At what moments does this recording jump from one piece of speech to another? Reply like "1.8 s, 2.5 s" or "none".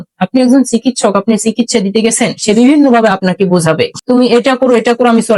4.2 s